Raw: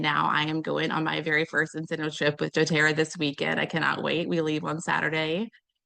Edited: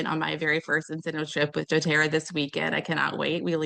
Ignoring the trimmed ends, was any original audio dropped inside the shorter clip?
no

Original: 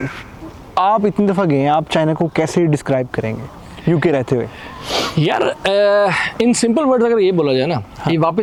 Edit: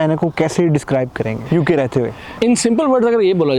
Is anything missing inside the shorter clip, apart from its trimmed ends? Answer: yes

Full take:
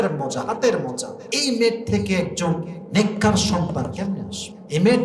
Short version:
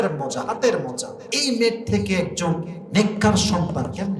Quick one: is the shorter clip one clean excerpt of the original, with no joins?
yes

